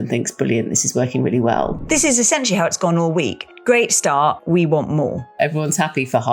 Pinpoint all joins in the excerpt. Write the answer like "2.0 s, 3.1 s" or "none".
1.8 s, 3.5 s, 4.4 s, 5.4 s